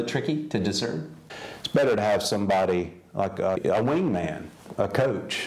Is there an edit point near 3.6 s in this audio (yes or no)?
yes